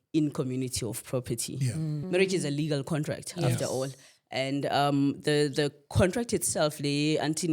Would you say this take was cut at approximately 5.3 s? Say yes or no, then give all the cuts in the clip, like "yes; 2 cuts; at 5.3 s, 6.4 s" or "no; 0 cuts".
no; 1 cut; at 2.0 s